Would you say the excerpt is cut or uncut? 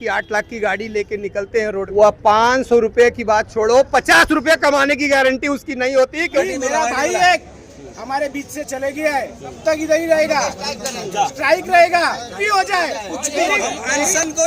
cut